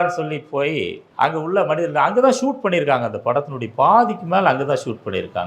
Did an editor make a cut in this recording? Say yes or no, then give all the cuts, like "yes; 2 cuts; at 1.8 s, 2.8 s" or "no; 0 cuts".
yes; 1 cut; at 1.0 s